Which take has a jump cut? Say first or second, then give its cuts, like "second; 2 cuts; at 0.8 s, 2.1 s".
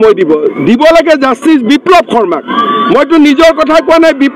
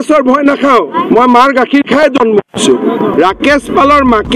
second; 1 cut; at 3.1 s